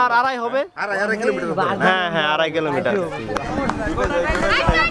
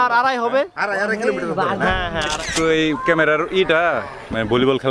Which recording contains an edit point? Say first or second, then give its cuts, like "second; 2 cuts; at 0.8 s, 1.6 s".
second; 1 cut; at 2.4 s